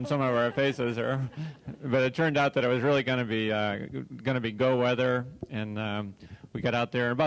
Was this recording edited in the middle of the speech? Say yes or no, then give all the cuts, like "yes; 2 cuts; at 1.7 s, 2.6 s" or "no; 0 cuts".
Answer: yes; 1 cut; at 3.3 s